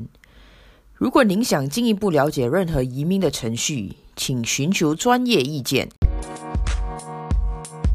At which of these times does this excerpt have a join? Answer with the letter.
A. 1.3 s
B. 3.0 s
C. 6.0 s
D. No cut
C